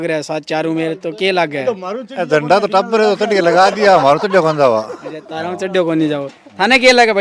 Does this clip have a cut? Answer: no; 0 cuts

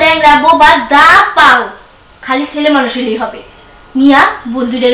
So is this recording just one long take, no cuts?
yes; 0 cuts

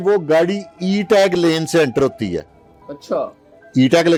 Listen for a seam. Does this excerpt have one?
no; 0 cuts

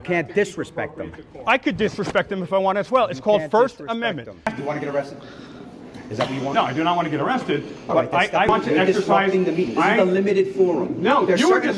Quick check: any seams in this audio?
no; 0 cuts

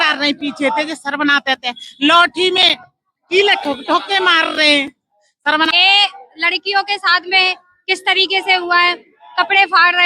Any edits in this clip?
yes; 1 cut; at 5.7 s

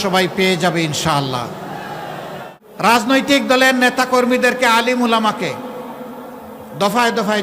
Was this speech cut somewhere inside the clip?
yes; 1 cut; at 2.6 s

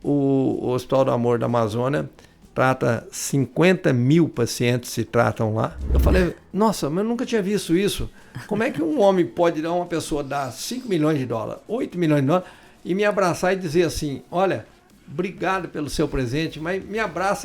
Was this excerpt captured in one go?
no; 1 cut; at 5.8 s

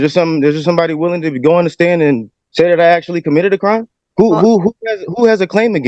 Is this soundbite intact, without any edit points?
no; 2 cuts; at 2.4 s, 4.0 s

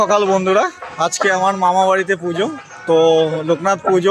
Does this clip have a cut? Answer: no; 0 cuts

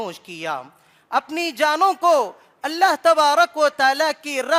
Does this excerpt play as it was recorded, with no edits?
yes; 0 cuts

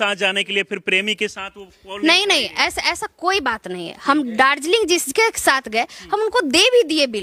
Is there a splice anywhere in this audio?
no; 0 cuts

